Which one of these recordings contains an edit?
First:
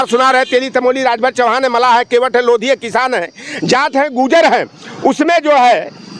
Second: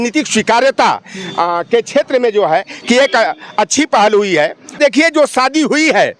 second; 1 cut; at 4.8 s

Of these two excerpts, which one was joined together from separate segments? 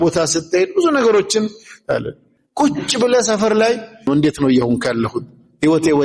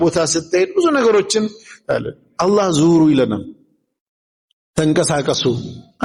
first; 2 cuts; at 2.2 s, 4.1 s

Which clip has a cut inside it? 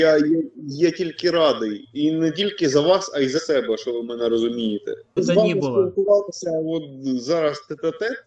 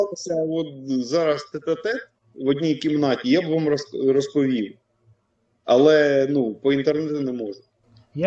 first; 1 cut; at 5.2 s

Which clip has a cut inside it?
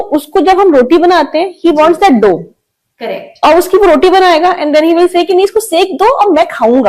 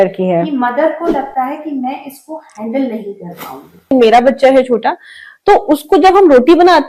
second; 1 cut; at 3.9 s

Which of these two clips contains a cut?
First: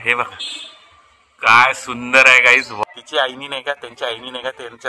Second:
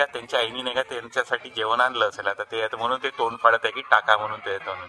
first; 1 cut; at 2.7 s

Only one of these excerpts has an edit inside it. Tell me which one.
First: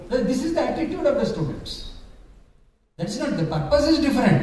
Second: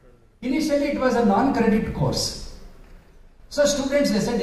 first; 1 cut; at 2.6 s

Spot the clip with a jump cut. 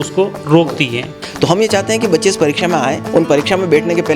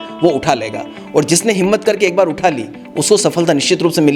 first; 2 cuts; at 1.1 s, 3.0 s

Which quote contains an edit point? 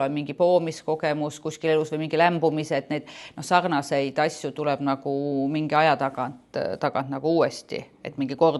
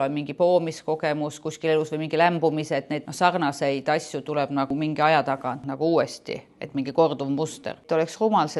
second; 4 cuts; at 3.0 s, 4.7 s, 5.7 s, 7.8 s

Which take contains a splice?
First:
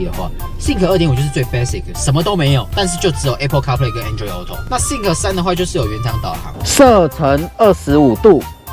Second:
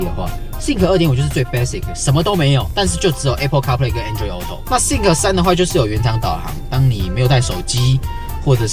first; 1 cut; at 6.6 s

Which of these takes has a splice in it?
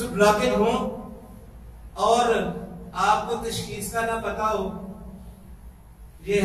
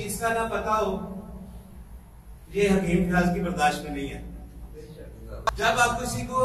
second; 1 cut; at 5.2 s

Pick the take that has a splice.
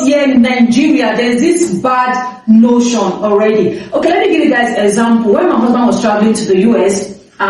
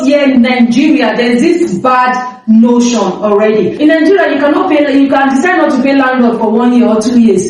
second; 1 cut; at 3.7 s

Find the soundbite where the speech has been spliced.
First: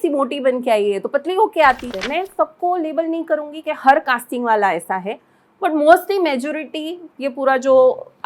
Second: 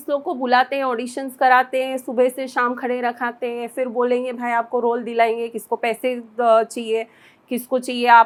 first; 1 cut; at 1.9 s

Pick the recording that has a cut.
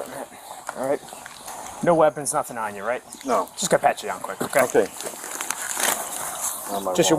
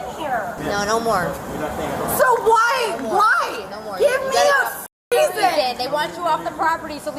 first; 1 cut; at 1.4 s

